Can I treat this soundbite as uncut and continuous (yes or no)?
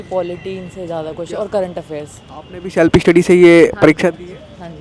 yes